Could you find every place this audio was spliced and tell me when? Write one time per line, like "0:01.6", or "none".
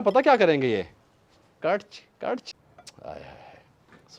0:02.5

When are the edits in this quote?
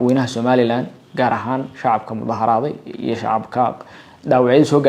none

